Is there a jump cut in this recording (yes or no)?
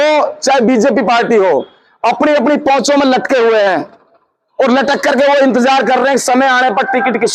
no